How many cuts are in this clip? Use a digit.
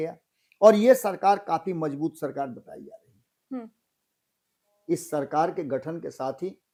0